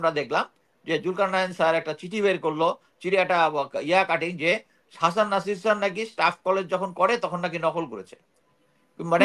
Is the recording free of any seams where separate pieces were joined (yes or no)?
yes